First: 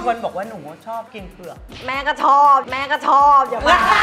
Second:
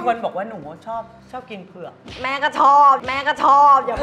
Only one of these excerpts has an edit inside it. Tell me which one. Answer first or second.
first